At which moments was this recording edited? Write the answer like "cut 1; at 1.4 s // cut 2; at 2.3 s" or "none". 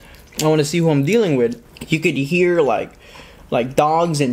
cut 1; at 1.7 s